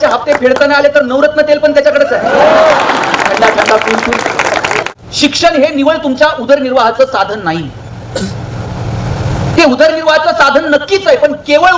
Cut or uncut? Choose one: cut